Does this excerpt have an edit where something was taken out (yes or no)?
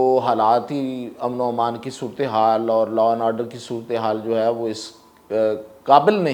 no